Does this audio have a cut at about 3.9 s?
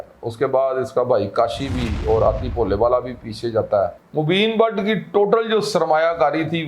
yes; 1 cut; at 3.9 s

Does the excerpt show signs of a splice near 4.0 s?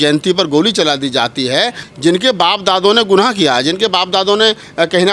no; 1 cut; at 1.8 s

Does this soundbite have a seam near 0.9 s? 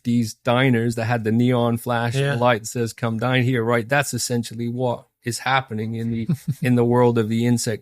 yes; 1 cut; at 0.9 s

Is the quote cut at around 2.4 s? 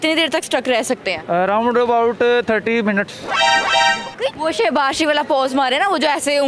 no; 2 cuts; at 1.1 s, 4.4 s

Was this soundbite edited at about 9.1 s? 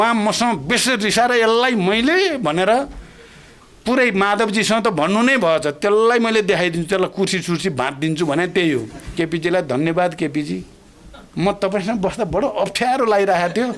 yes; 1 cut; at 9.1 s

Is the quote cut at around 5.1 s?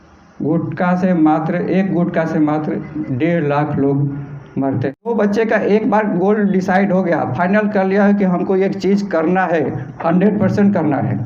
yes; 1 cut; at 5.1 s

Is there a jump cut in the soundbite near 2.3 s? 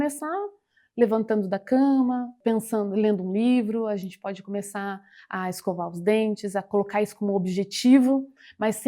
yes; 1 cut; at 2.3 s

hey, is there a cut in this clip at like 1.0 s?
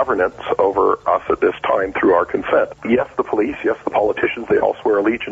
yes; 2 cuts; at 1.0 s, 2.8 s

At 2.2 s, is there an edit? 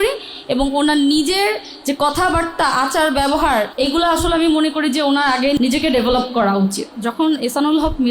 no; 3 cuts; at 3.7 s, 5.6 s, 6.9 s

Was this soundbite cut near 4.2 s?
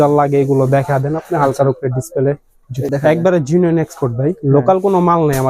no; 1 cut; at 2.9 s

